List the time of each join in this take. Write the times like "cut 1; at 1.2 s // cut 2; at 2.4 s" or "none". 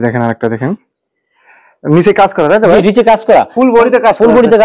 none